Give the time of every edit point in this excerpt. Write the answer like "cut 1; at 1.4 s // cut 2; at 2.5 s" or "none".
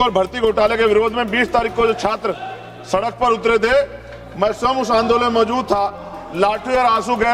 none